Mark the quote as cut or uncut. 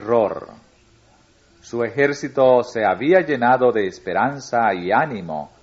uncut